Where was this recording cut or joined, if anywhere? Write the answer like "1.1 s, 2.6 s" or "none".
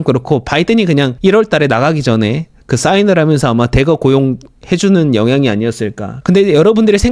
1.1 s, 6.1 s